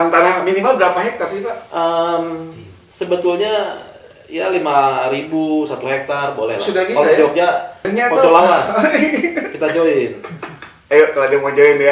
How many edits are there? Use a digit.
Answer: 1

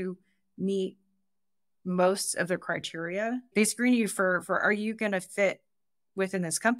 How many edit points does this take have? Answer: 0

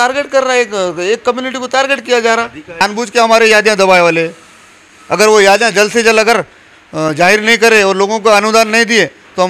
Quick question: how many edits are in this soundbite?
1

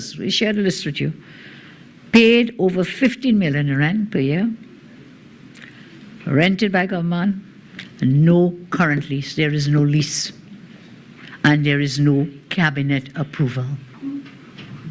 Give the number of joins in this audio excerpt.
0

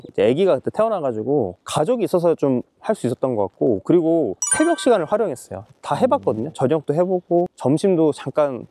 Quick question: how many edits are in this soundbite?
0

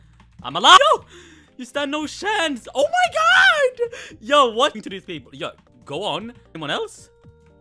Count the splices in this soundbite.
3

